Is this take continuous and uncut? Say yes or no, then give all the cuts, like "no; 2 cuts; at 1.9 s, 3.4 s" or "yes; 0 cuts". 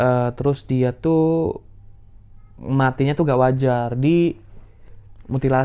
yes; 0 cuts